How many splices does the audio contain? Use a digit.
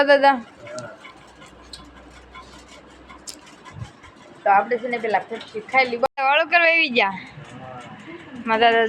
1